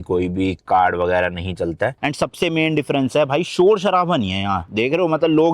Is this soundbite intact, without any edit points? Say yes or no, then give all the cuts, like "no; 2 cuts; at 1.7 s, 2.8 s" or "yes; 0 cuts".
no; 1 cut; at 2.0 s